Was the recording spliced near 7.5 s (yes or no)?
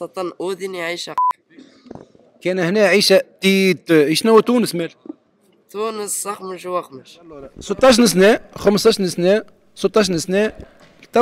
yes